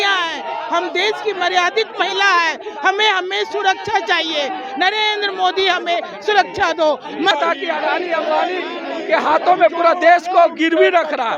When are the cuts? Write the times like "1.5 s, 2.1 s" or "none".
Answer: 7.3 s